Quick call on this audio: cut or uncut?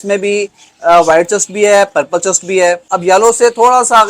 cut